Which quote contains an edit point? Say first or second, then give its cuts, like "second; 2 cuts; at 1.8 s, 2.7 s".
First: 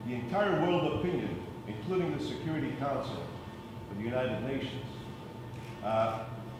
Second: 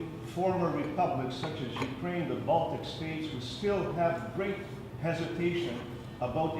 second; 1 cut; at 2.9 s